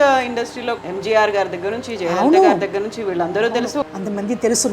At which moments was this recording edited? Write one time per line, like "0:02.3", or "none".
0:00.8
0:03.8